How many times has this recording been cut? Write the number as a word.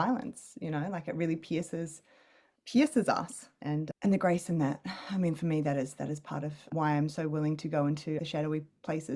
one